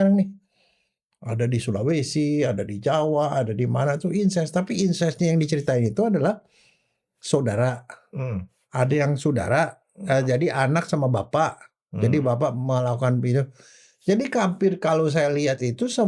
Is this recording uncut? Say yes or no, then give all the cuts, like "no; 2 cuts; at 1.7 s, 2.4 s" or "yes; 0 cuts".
yes; 0 cuts